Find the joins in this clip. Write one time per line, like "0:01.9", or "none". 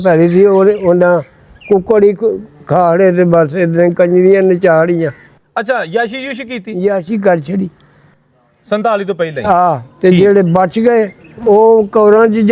none